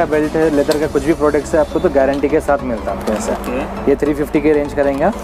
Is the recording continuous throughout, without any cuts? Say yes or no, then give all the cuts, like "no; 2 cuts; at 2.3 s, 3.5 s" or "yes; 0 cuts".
yes; 0 cuts